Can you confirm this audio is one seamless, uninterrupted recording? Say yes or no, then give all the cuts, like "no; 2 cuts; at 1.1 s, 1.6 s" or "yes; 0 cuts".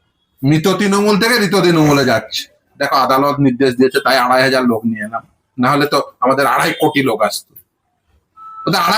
no; 1 cut; at 2.7 s